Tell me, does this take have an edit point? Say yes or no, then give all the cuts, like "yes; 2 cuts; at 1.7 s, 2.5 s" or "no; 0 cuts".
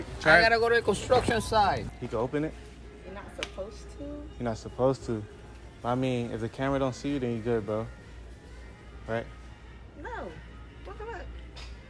yes; 1 cut; at 1.9 s